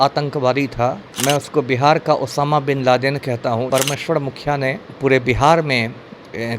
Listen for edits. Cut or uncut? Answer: cut